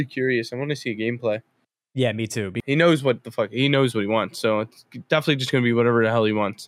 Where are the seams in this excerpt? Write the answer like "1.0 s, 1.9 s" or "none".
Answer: 2.5 s